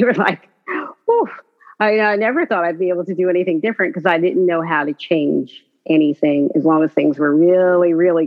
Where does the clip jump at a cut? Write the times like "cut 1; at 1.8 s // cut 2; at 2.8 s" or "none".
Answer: none